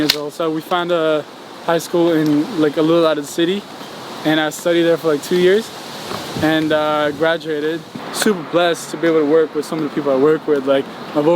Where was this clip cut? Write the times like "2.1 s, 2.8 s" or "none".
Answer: 7.9 s